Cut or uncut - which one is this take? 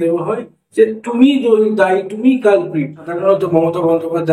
cut